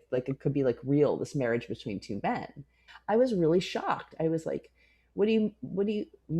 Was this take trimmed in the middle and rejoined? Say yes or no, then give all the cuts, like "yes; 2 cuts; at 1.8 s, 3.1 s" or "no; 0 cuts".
yes; 1 cut; at 2.9 s